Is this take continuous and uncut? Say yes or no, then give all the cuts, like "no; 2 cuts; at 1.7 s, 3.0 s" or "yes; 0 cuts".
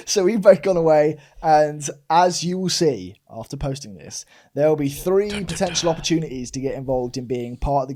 yes; 0 cuts